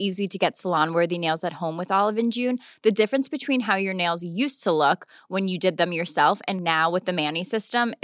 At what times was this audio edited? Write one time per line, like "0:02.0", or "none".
none